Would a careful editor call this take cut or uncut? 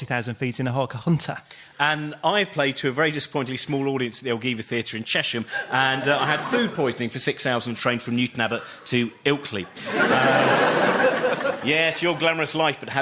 uncut